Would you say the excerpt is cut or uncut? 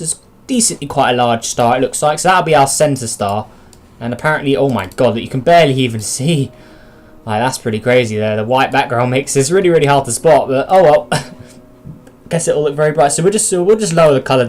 cut